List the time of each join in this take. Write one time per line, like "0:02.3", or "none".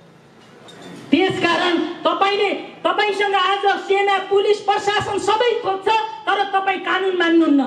none